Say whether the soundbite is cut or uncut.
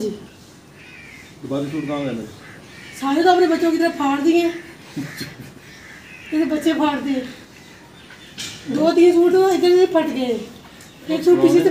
uncut